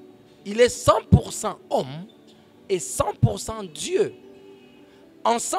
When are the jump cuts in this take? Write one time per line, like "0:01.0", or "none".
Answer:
none